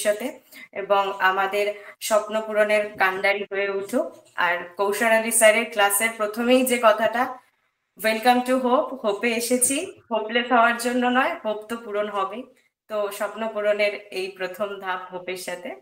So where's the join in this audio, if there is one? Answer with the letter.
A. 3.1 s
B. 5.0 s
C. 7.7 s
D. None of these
D